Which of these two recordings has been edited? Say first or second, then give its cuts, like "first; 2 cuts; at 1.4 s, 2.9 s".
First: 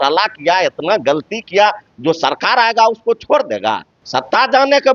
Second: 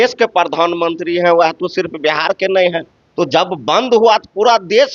first; 1 cut; at 3.9 s